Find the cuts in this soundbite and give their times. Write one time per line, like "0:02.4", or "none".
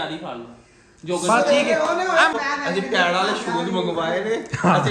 0:02.3